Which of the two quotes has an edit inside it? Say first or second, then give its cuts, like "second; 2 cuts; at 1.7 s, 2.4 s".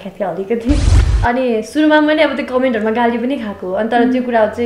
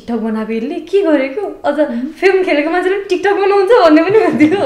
first; 1 cut; at 0.9 s